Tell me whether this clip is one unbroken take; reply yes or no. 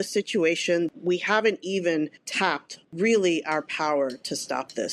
yes